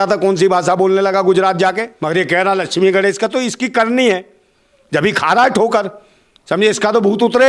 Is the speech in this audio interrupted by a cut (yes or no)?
yes